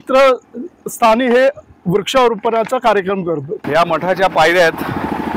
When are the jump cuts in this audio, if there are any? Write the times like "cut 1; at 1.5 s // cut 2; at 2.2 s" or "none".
cut 1; at 3.6 s